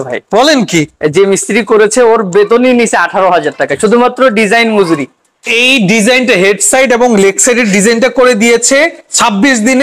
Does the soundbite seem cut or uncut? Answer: uncut